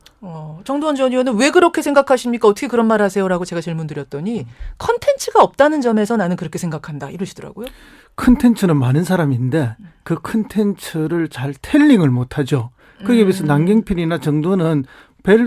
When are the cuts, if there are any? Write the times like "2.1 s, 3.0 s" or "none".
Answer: none